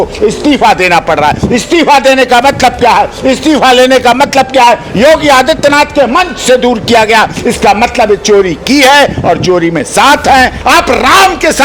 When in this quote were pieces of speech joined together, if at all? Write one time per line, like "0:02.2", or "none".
0:10.6